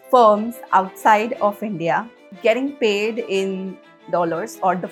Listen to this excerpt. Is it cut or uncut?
uncut